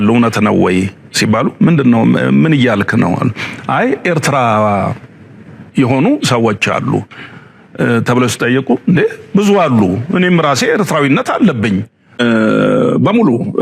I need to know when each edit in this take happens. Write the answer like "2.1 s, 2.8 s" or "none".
12.0 s